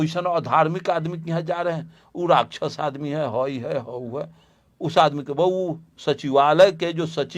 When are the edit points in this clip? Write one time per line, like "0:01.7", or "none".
none